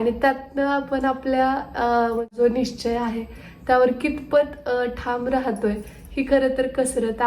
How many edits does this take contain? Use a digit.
1